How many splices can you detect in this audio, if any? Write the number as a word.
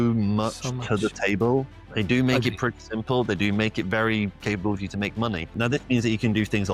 two